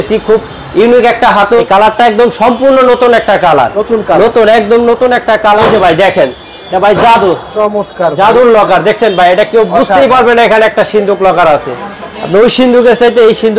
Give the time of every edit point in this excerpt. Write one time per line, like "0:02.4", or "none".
0:01.6
0:05.6
0:06.6

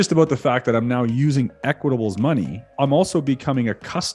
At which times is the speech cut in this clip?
0:02.7

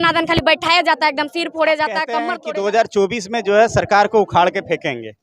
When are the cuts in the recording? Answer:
0:02.4

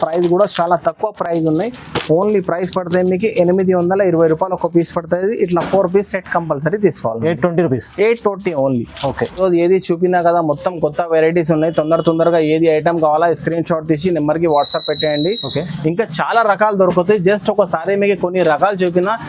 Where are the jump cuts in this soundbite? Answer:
none

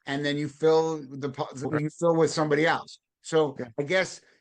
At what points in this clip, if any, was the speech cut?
0:01.6

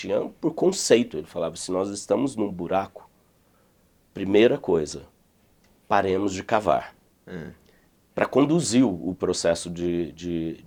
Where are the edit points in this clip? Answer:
none

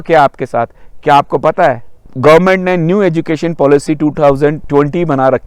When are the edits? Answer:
0:02.1
0:04.6

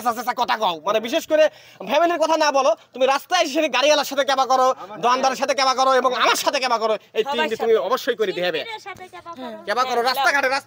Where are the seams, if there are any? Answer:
none

